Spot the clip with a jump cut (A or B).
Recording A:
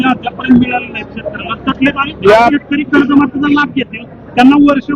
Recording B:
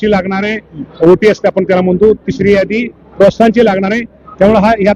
A